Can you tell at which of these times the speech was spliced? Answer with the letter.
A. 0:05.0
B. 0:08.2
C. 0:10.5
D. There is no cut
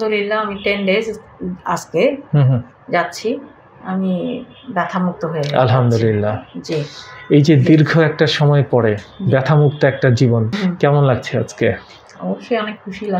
C